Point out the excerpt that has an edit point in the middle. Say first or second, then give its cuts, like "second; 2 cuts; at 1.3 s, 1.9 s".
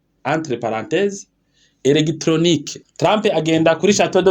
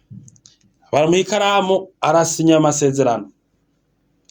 first; 1 cut; at 2.8 s